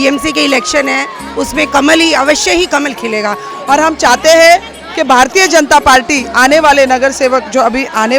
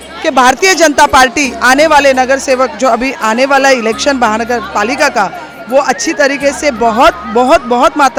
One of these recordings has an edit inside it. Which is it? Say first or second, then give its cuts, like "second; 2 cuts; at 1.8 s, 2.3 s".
first; 1 cut; at 3.5 s